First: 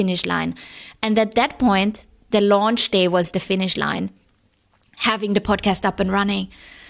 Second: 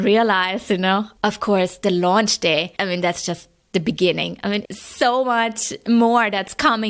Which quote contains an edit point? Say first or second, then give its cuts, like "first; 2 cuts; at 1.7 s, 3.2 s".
second; 3 cuts; at 1.1 s, 2.7 s, 4.6 s